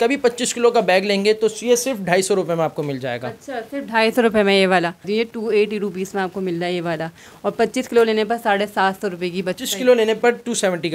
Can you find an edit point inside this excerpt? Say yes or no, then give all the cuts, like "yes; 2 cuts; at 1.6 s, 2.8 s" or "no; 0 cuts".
yes; 2 cuts; at 5.1 s, 9.5 s